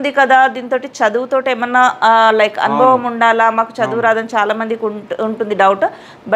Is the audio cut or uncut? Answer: uncut